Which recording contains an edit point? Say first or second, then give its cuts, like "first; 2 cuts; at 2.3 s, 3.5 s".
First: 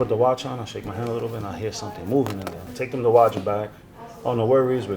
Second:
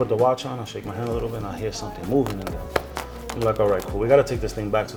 first; 1 cut; at 2.5 s